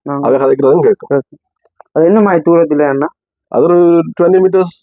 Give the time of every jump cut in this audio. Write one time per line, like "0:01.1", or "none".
none